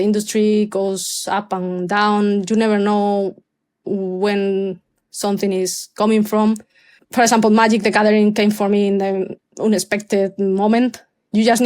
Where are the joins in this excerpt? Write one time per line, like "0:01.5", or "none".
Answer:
0:07.0
0:09.5